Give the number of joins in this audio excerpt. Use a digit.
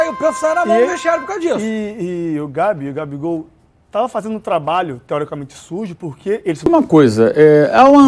1